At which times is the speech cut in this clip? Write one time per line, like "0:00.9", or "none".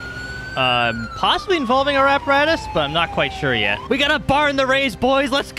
0:03.8